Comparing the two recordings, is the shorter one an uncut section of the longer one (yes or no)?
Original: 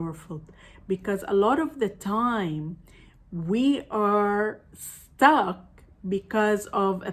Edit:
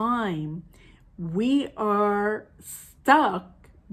yes